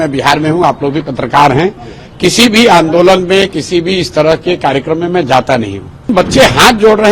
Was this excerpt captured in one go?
no; 1 cut; at 6.1 s

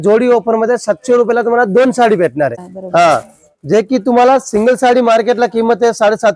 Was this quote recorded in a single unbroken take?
no; 1 cut; at 2.6 s

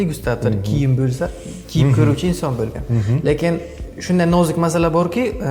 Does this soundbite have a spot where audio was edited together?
no; 0 cuts

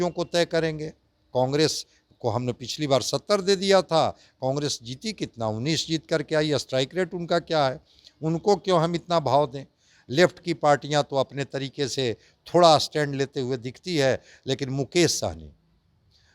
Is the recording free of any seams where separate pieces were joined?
yes; 0 cuts

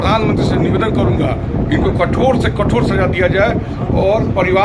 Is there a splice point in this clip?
no; 0 cuts

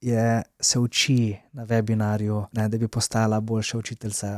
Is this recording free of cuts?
no; 1 cut; at 2.5 s

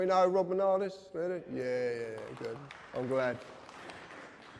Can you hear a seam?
no; 0 cuts

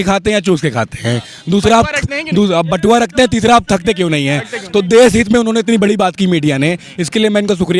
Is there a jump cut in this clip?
no; 0 cuts

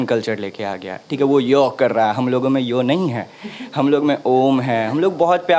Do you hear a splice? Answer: no; 0 cuts

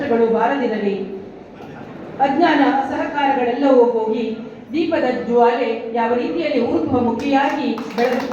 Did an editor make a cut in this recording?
no; 0 cuts

